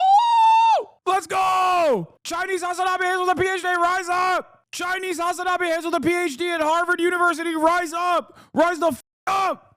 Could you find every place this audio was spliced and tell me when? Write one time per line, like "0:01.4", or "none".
none